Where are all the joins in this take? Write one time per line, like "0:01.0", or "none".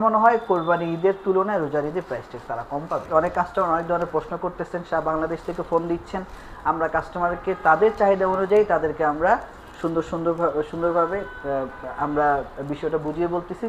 0:03.1